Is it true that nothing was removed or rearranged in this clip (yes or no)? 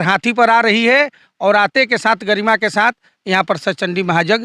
yes